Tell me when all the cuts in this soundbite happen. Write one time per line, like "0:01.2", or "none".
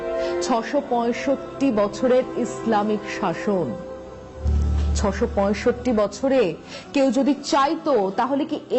0:04.4